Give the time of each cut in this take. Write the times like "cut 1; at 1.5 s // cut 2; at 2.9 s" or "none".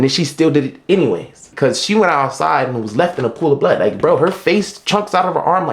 cut 1; at 1.4 s